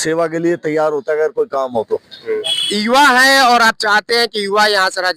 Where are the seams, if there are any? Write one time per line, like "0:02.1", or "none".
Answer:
0:02.6